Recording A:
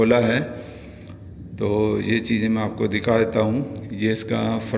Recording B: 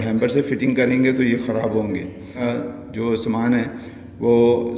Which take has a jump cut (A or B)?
B